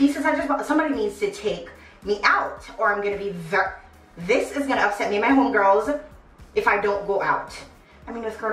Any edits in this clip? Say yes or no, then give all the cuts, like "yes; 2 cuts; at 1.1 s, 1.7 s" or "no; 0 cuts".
no; 0 cuts